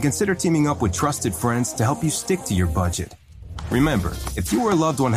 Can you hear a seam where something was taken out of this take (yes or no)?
no